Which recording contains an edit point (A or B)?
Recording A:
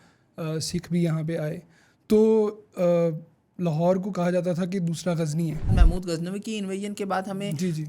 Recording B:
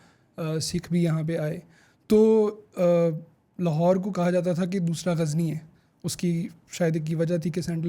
A